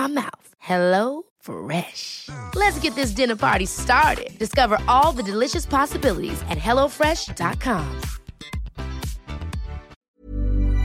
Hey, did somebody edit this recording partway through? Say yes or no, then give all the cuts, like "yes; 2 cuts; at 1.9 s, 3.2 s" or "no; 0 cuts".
yes; 1 cut; at 9.9 s